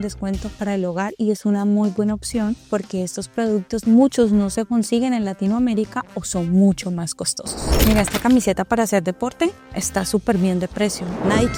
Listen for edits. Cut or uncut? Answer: uncut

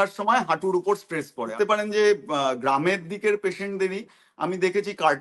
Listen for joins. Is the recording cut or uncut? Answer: cut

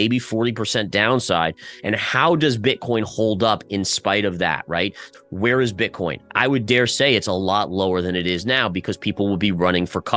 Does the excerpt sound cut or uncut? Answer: cut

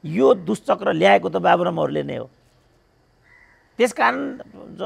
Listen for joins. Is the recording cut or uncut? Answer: uncut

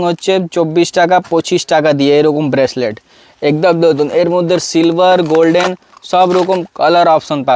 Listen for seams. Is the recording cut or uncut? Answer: uncut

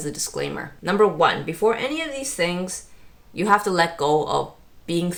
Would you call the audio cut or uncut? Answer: uncut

